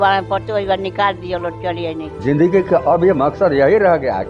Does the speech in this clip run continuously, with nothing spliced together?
no; 1 cut; at 2.2 s

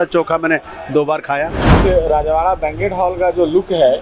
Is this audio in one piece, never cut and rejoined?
no; 1 cut; at 1.7 s

